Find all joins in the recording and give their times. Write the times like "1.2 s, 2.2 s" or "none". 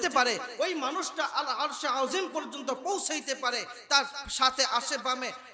none